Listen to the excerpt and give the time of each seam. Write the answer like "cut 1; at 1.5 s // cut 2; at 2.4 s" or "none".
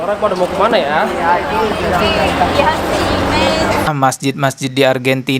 cut 1; at 3.9 s